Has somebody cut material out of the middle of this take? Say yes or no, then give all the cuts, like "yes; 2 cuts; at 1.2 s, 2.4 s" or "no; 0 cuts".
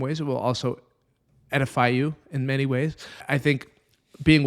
yes; 1 cut; at 3.2 s